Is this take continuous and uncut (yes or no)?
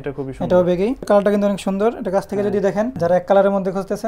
no